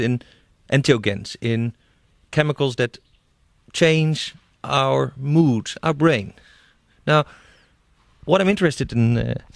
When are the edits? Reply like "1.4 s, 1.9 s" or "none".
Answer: 2.6 s